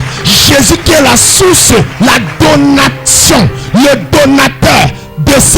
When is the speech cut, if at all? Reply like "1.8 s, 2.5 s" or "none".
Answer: 1.9 s